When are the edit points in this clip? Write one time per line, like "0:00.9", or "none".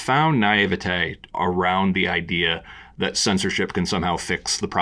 0:01.3